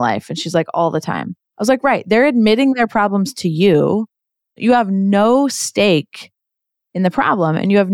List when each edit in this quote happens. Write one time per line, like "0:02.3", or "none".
0:04.6